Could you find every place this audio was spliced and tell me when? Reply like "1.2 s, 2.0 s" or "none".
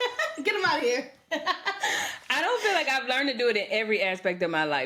none